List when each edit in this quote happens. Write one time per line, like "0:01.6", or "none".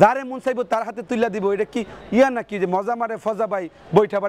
none